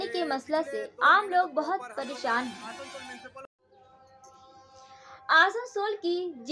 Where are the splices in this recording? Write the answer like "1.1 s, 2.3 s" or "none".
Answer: 3.4 s